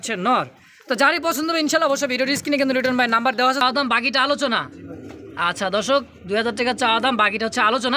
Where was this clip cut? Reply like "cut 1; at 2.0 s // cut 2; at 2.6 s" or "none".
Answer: cut 1; at 3.6 s